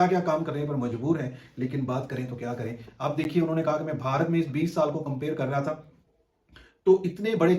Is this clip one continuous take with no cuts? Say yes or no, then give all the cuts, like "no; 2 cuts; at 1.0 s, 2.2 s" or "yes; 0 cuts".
yes; 0 cuts